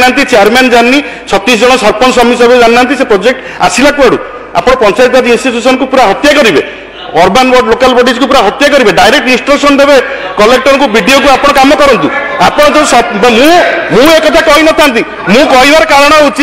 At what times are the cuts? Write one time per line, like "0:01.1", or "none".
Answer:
none